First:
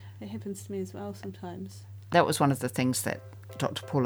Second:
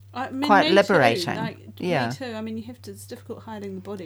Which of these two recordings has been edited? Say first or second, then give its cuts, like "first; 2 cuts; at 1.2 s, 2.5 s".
first; 1 cut; at 2.1 s